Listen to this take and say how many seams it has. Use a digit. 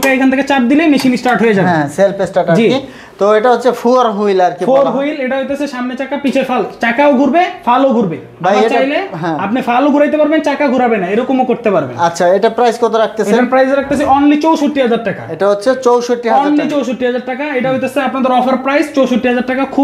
0